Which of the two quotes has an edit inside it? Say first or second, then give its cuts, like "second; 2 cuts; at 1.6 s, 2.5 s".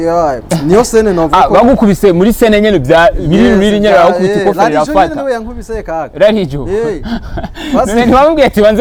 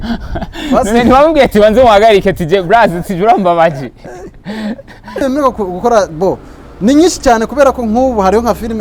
second; 1 cut; at 5.2 s